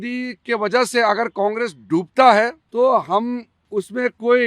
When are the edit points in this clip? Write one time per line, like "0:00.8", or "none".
0:02.6
0:03.5